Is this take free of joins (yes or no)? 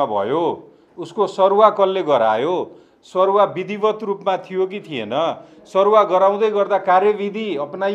yes